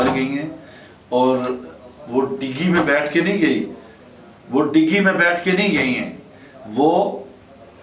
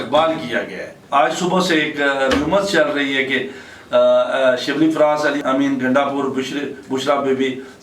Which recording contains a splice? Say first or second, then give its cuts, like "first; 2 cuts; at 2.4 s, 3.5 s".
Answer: second; 2 cuts; at 1.0 s, 5.4 s